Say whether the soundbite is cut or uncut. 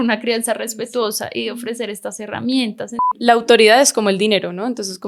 cut